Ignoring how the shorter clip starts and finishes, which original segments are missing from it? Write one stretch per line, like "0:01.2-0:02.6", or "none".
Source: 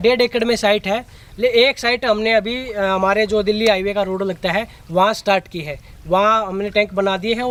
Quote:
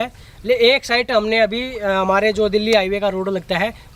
none